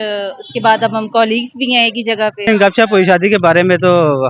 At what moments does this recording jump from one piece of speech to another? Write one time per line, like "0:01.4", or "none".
0:02.5